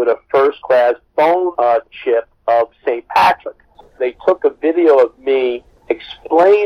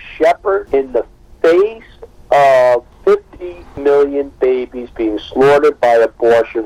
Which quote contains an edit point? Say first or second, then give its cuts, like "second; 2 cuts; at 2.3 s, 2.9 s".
first; 2 cuts; at 1.5 s, 4.0 s